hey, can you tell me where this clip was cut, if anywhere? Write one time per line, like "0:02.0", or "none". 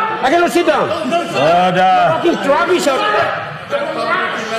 none